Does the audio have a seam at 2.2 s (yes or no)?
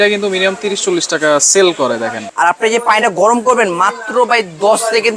yes